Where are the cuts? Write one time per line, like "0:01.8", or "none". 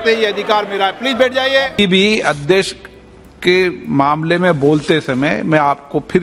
0:01.7